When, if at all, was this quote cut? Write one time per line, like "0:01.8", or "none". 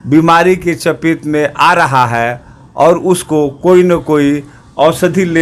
none